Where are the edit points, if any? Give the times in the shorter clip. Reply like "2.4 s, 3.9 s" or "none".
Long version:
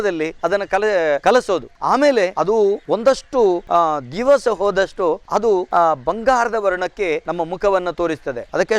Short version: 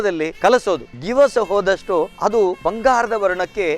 0.8 s, 2.6 s